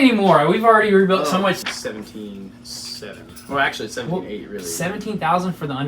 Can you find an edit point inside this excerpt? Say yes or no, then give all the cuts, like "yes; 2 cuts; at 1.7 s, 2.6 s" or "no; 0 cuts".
yes; 1 cut; at 1.6 s